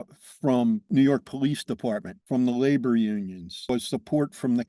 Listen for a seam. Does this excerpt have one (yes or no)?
yes